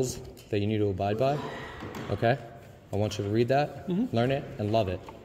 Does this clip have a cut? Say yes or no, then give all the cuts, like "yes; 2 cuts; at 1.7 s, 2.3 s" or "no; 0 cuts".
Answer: no; 0 cuts